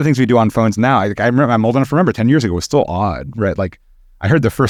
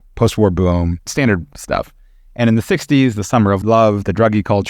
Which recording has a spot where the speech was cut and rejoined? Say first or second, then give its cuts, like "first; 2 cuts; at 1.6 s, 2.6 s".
second; 2 cuts; at 1.1 s, 3.6 s